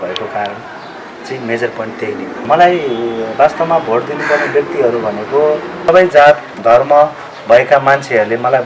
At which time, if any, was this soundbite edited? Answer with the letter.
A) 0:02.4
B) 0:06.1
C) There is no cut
A